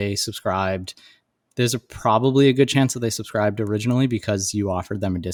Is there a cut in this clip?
no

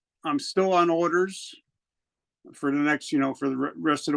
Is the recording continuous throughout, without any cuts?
yes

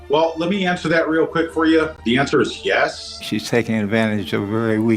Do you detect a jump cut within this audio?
yes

